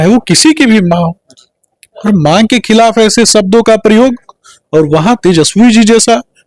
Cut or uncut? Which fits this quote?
uncut